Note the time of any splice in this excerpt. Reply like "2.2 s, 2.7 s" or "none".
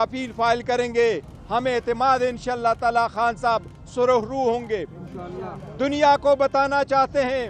none